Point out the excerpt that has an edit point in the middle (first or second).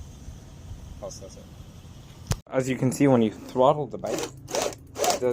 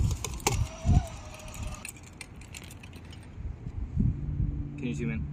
first